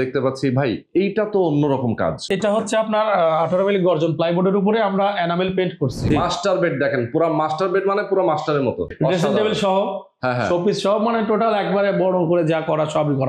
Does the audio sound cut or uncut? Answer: cut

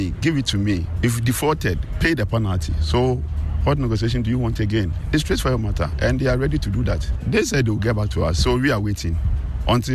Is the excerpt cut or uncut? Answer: cut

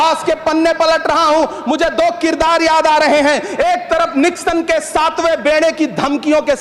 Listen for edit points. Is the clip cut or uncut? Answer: uncut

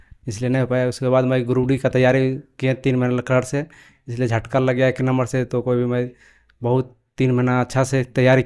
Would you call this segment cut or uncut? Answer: uncut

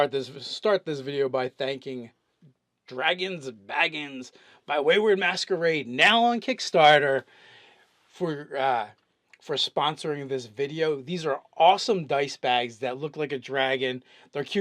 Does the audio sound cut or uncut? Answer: cut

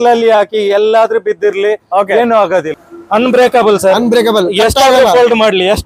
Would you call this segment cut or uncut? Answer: cut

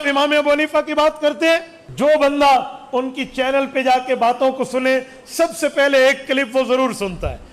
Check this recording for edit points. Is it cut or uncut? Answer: cut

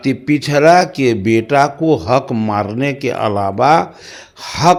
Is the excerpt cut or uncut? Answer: uncut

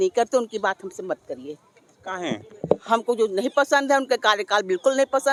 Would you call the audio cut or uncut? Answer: uncut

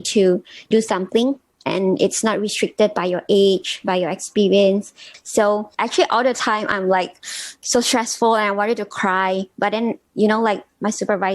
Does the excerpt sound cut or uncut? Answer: cut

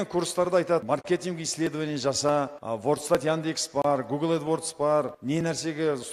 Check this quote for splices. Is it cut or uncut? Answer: cut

